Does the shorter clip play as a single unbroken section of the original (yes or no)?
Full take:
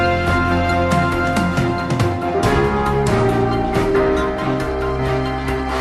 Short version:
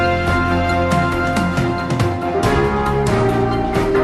yes